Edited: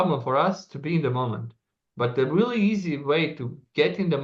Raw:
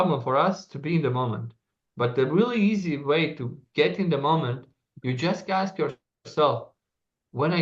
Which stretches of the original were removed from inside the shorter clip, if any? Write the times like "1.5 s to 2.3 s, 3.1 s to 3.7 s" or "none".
none